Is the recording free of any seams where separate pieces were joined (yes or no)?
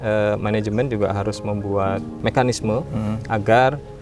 no